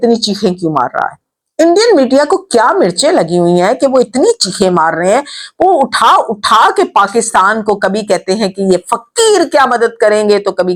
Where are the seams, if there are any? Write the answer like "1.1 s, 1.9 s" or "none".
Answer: none